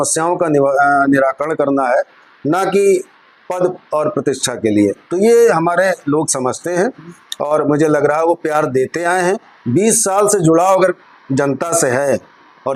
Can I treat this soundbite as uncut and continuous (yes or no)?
yes